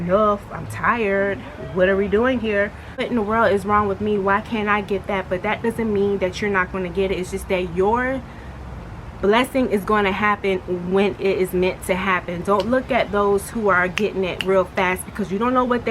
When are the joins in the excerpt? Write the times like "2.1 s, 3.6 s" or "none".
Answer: 3.1 s